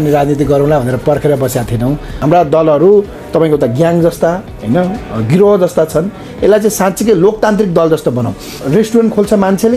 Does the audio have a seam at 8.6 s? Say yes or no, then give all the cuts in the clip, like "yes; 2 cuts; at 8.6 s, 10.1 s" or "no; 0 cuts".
yes; 2 cuts; at 2.1 s, 8.6 s